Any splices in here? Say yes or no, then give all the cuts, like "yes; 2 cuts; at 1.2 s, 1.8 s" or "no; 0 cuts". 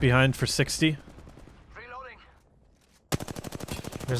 no; 0 cuts